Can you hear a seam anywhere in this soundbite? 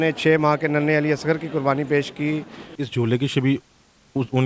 yes; 1 cut; at 2.8 s

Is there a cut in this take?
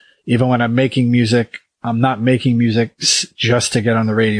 no; 0 cuts

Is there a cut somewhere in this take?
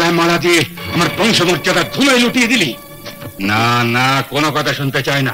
yes; 1 cut; at 3.4 s

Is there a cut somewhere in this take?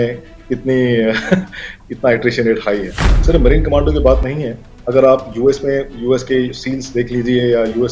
yes; 1 cut; at 3.2 s

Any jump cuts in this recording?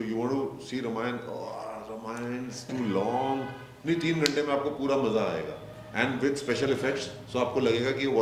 no; 0 cuts

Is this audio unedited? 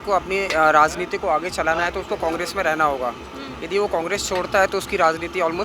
yes; 0 cuts

